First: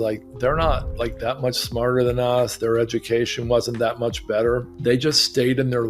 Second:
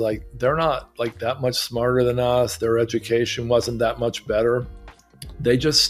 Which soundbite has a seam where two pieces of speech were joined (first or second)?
first